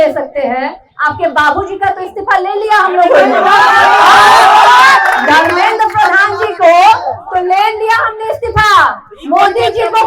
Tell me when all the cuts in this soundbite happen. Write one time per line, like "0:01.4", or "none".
none